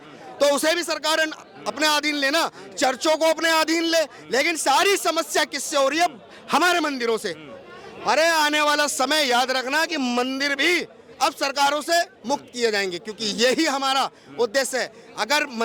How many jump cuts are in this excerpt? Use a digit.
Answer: 0